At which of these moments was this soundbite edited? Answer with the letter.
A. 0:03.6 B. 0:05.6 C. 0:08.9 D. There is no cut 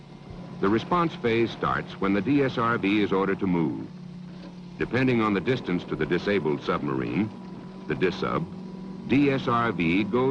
B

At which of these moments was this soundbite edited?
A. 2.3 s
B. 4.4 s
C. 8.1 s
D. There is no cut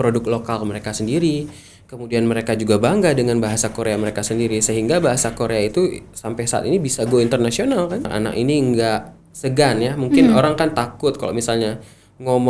C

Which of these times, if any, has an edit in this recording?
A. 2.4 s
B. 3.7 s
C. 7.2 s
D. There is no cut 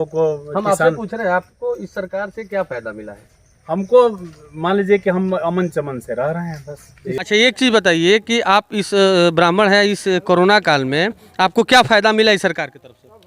C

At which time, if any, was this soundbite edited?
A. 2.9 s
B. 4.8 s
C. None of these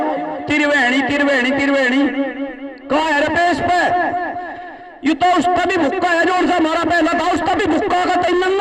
C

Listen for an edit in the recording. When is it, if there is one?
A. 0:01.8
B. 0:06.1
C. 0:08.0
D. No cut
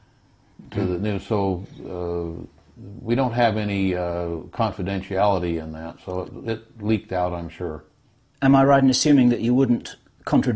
C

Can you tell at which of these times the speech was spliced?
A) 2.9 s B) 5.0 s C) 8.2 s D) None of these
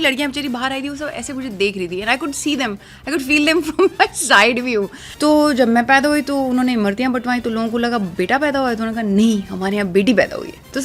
B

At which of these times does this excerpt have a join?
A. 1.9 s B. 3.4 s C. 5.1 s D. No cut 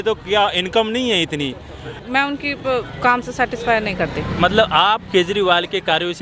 A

